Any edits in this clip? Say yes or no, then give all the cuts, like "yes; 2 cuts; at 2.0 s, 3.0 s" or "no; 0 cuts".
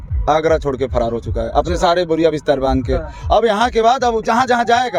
no; 0 cuts